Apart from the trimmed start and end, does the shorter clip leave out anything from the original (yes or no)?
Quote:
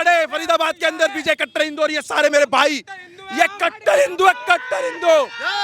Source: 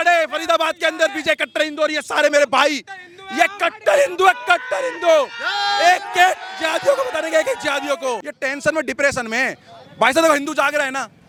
no